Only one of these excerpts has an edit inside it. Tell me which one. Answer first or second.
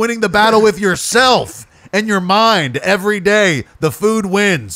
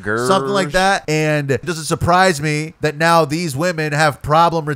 second